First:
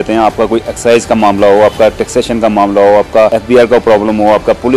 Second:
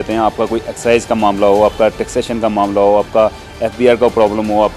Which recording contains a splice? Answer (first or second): first